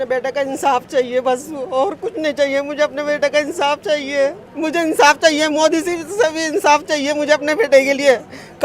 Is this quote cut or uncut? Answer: cut